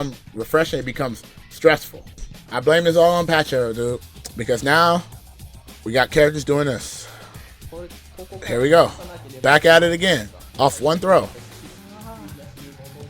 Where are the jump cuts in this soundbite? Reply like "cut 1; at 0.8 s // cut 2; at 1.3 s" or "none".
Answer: cut 1; at 11.8 s